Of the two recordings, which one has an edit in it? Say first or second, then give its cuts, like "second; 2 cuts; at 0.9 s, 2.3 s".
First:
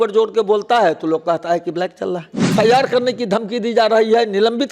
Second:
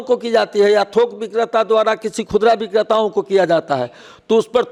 first; 1 cut; at 2.5 s